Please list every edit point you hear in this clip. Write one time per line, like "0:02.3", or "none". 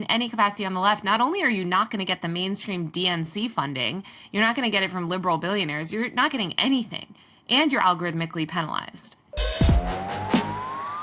0:09.2